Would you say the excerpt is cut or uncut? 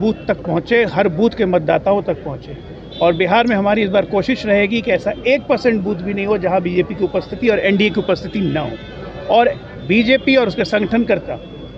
uncut